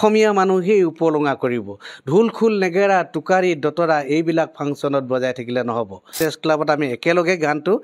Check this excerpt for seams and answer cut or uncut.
cut